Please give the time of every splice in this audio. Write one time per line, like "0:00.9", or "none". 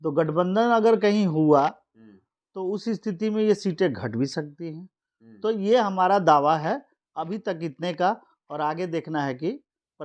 none